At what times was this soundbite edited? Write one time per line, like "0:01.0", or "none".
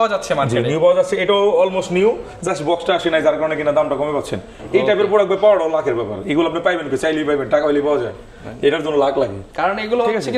none